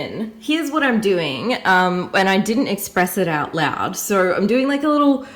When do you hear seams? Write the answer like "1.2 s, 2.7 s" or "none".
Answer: none